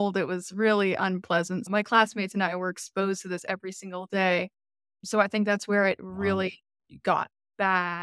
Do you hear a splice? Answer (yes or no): yes